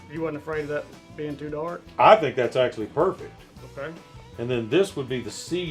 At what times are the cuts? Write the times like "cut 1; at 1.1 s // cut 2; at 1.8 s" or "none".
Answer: none